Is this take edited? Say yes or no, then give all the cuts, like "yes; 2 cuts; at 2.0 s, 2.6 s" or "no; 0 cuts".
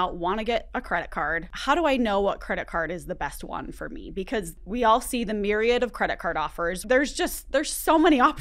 yes; 3 cuts; at 1.5 s, 4.6 s, 6.8 s